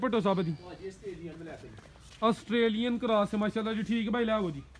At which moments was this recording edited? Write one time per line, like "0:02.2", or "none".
none